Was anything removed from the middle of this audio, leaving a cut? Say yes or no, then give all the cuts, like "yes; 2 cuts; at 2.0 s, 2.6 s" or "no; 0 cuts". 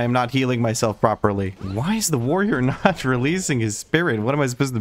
no; 0 cuts